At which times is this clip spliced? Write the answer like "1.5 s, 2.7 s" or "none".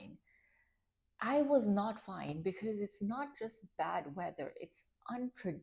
none